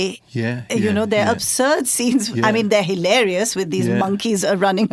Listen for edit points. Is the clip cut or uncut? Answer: uncut